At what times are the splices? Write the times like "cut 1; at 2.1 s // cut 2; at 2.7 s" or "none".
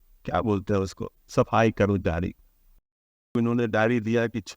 cut 1; at 3.4 s